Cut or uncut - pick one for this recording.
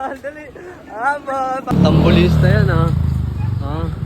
cut